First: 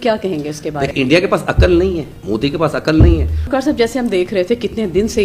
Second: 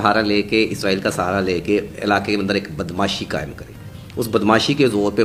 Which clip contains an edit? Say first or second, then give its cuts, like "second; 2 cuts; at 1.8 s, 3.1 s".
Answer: first; 3 cuts; at 0.9 s, 2.1 s, 3.4 s